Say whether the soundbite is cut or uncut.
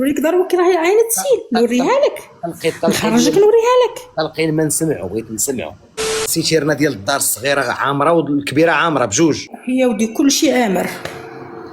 cut